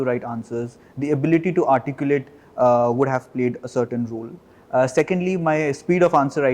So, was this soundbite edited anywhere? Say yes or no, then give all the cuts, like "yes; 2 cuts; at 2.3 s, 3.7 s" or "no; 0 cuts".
no; 0 cuts